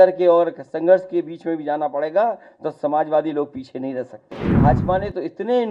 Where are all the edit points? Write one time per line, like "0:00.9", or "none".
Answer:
0:04.5